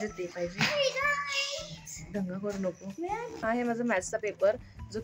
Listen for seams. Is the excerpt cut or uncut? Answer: cut